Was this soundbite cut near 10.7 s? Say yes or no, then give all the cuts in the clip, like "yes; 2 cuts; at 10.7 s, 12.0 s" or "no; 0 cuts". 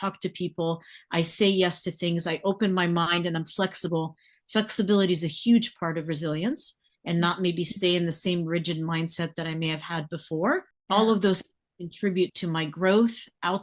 yes; 1 cut; at 10.7 s